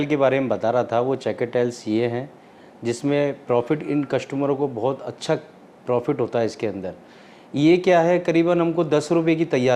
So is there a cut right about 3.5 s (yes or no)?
no